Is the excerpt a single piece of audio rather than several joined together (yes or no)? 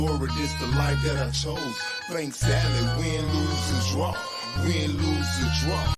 yes